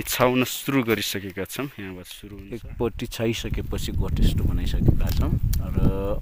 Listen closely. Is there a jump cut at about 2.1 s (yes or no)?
yes